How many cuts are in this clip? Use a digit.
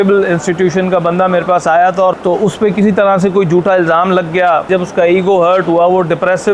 2